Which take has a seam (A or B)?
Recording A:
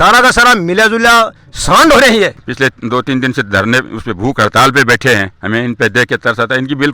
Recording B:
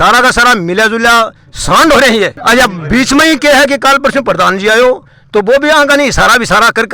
A